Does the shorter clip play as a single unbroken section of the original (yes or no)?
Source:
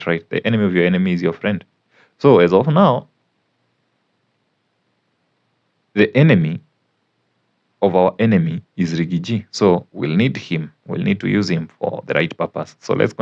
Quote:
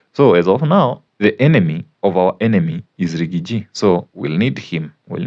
no